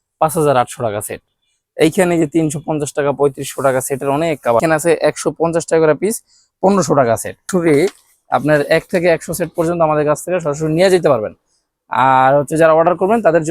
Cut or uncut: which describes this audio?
cut